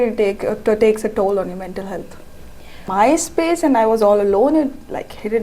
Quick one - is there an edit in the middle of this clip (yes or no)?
yes